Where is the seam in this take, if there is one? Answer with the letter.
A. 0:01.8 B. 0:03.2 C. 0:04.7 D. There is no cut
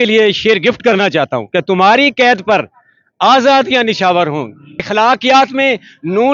C